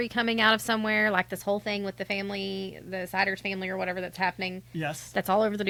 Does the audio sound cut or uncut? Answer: uncut